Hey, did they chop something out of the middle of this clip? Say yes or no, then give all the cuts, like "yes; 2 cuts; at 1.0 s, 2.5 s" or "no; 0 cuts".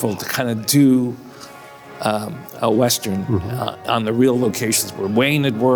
no; 0 cuts